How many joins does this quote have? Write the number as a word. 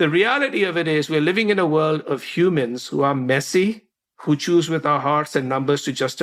zero